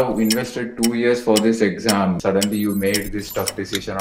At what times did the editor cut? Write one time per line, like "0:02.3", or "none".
0:02.2